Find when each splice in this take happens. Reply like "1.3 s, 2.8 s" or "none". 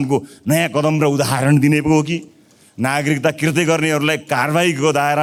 none